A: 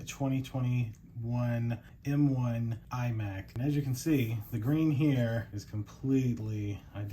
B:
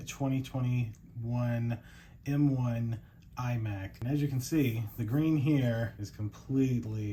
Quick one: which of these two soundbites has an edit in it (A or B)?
A